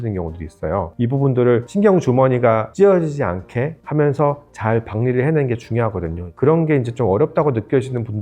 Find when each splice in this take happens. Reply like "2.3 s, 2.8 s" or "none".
0.9 s, 1.7 s, 2.7 s, 3.8 s